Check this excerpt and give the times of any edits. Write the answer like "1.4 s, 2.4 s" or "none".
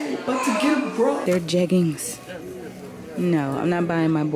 1.2 s